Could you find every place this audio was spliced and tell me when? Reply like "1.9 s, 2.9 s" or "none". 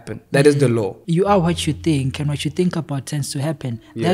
1.0 s